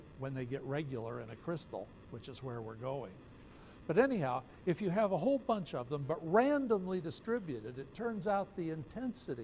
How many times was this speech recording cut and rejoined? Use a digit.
1